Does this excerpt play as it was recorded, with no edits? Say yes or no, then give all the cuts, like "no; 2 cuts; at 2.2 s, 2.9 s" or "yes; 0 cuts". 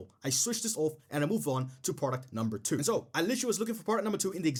yes; 0 cuts